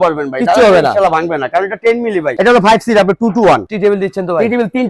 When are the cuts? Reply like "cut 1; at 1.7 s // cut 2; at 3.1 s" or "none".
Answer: cut 1; at 2.4 s // cut 2; at 3.7 s